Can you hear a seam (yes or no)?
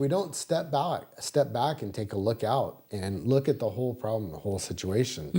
no